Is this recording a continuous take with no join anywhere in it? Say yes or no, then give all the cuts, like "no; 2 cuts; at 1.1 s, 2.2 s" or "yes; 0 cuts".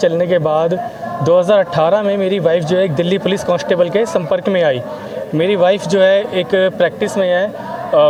yes; 0 cuts